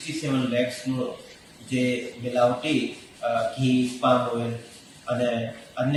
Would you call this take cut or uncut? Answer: uncut